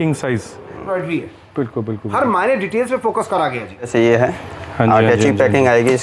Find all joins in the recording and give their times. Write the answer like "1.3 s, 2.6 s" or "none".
0.9 s, 3.9 s